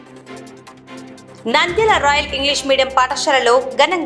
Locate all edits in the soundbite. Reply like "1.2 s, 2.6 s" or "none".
1.2 s